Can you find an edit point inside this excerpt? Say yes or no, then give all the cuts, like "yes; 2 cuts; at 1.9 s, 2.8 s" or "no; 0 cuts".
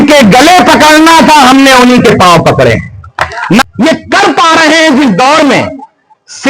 yes; 1 cut; at 3.6 s